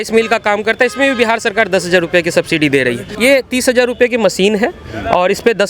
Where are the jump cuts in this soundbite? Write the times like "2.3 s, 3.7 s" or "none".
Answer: 3.1 s